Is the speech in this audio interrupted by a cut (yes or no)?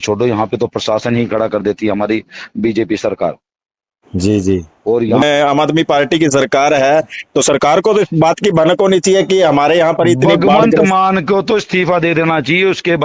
yes